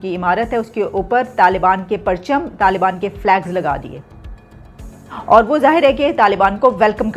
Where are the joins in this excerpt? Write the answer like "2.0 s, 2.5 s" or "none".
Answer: none